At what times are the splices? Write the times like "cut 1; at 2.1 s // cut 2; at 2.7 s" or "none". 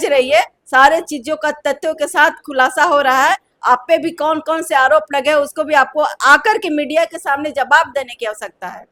none

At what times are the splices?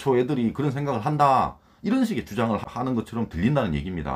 cut 1; at 2.7 s

